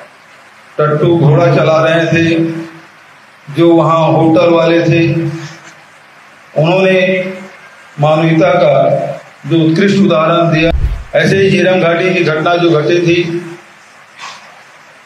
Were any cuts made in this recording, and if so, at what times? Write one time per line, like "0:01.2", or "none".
0:10.7

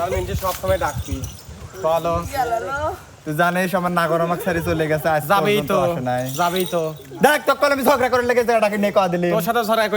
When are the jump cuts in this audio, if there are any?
none

